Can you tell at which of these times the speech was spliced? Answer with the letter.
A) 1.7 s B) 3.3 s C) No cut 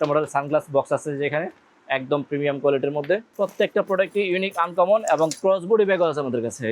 B